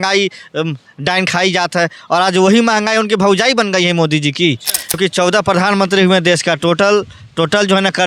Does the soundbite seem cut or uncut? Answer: cut